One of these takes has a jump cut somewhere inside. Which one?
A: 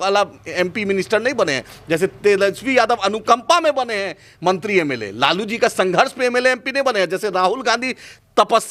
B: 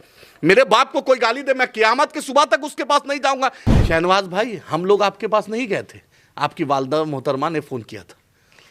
B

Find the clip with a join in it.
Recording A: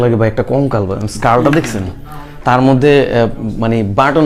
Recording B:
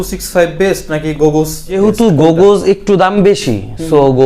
B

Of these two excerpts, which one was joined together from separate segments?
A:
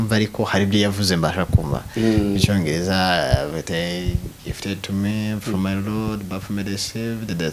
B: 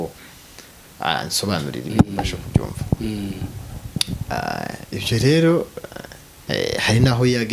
B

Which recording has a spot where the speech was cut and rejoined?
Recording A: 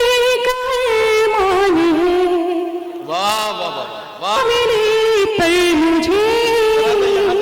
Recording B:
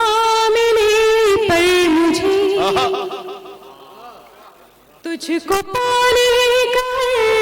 A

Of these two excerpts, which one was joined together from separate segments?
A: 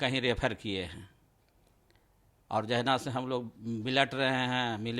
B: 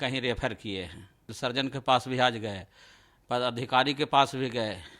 B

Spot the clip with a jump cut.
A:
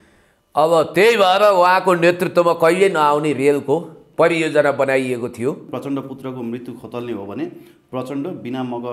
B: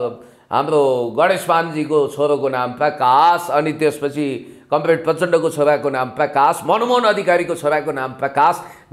A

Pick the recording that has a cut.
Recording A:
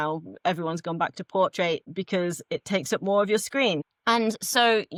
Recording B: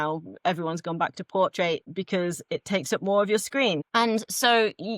B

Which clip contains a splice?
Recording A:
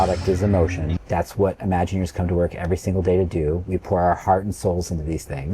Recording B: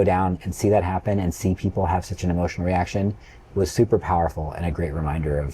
A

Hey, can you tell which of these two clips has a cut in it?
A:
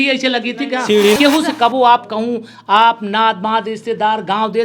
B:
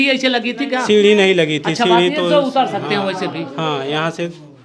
A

